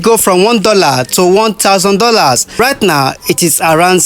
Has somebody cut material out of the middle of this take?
yes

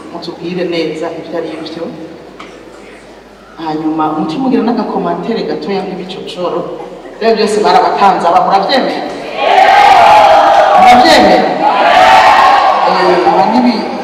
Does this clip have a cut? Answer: no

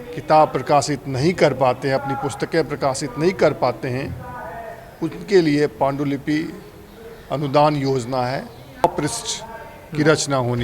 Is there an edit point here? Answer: yes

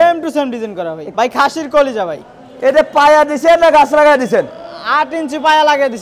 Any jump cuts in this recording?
yes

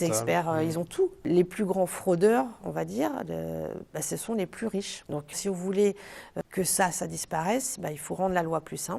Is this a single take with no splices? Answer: no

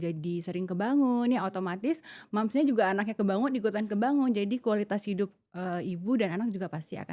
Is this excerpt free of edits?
yes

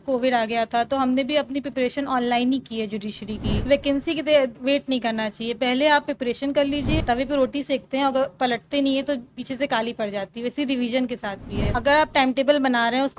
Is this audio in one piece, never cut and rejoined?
no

